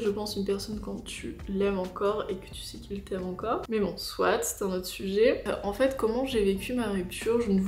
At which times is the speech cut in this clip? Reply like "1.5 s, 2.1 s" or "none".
none